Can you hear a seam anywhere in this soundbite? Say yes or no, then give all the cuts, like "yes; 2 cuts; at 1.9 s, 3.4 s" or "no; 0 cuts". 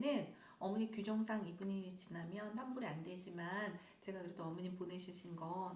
no; 0 cuts